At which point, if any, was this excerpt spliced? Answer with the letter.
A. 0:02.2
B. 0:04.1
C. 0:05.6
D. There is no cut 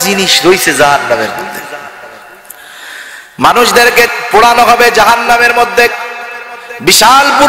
B